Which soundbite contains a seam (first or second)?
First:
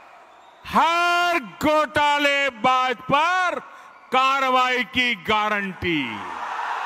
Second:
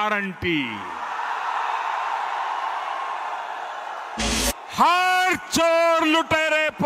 second